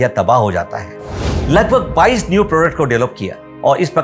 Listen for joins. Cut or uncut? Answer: cut